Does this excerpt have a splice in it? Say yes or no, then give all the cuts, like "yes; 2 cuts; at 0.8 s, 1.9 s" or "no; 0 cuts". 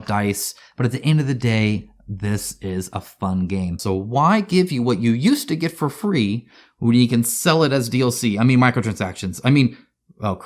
yes; 1 cut; at 3.8 s